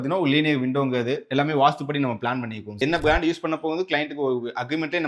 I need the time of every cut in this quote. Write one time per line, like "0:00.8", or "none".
0:02.7